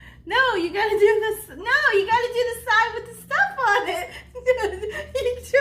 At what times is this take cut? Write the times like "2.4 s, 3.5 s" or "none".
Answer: none